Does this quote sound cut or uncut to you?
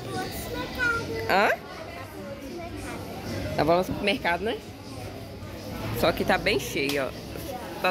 uncut